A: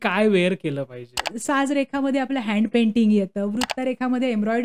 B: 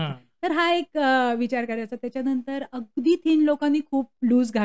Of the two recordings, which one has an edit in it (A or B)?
A